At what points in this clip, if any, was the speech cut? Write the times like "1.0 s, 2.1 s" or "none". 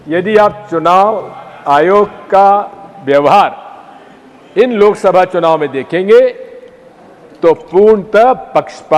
none